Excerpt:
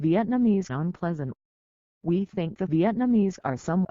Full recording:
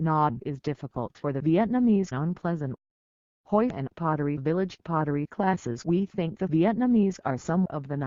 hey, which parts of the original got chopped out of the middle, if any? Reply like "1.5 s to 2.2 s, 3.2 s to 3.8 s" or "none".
3.3 s to 5.7 s